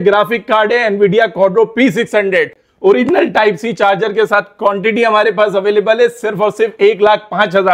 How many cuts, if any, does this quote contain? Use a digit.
0